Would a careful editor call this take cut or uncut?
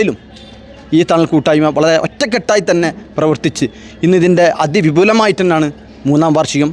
uncut